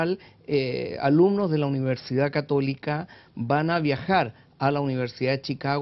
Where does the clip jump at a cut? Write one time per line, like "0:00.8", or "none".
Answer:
0:02.5